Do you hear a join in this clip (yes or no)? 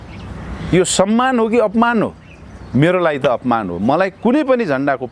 no